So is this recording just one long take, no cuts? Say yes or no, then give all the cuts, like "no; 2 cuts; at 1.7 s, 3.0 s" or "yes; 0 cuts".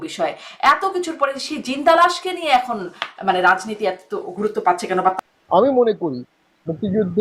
no; 1 cut; at 5.2 s